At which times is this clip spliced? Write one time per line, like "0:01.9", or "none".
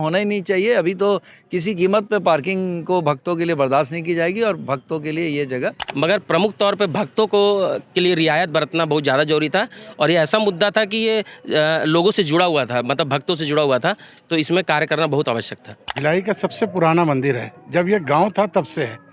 0:05.8
0:15.9